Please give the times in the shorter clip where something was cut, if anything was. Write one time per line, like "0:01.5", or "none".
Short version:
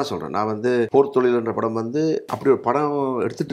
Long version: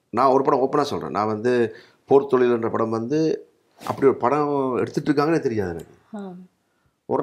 0:00.9
0:02.3